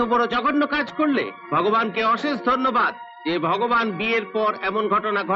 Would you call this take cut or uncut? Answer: uncut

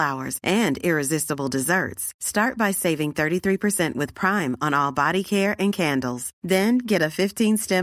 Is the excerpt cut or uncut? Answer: uncut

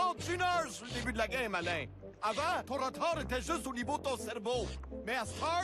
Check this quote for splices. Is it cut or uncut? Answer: uncut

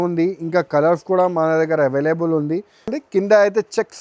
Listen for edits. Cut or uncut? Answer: cut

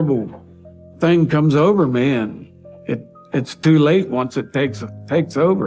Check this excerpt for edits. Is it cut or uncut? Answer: uncut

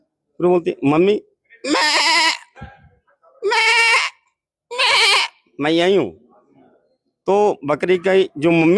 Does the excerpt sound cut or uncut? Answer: uncut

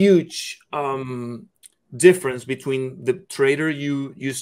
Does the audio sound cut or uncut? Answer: uncut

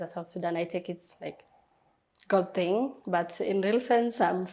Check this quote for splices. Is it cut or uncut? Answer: uncut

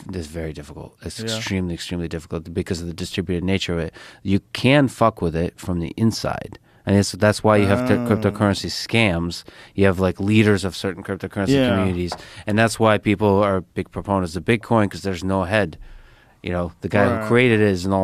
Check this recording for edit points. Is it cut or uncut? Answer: uncut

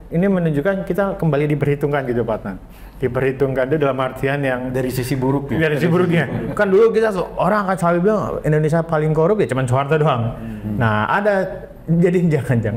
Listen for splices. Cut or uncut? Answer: uncut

